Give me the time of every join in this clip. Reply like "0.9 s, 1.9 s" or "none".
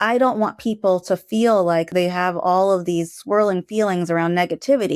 1.9 s, 3.2 s